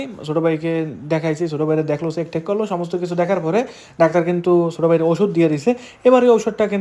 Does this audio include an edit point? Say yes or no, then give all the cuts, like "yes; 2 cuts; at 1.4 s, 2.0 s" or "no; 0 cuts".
no; 0 cuts